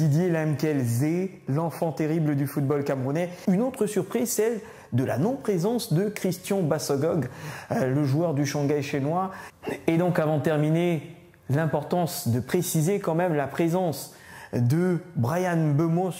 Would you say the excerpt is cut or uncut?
cut